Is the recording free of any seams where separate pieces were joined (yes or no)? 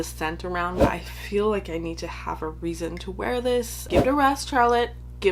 no